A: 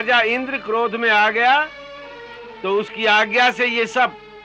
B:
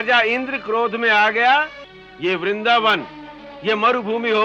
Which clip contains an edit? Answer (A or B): B